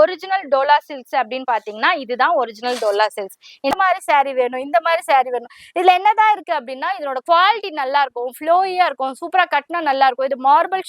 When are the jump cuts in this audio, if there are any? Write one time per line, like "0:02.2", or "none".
0:03.7